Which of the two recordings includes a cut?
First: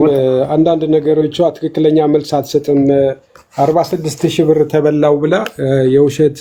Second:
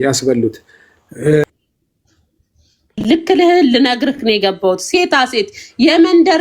second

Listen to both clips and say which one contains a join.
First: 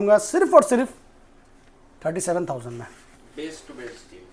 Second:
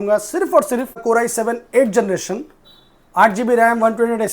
second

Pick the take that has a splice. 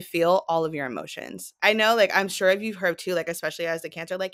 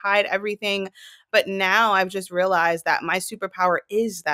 first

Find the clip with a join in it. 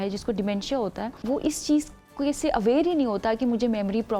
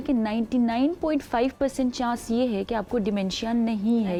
first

